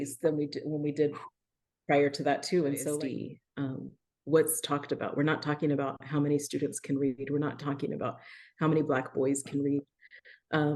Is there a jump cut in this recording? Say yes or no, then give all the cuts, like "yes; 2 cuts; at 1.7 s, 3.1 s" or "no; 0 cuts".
yes; 1 cut; at 3.0 s